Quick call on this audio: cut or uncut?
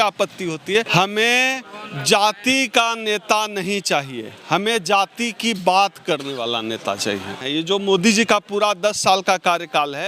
cut